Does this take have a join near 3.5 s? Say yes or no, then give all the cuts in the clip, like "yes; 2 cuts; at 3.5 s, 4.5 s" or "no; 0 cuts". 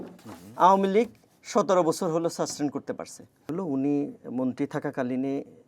yes; 1 cut; at 3.5 s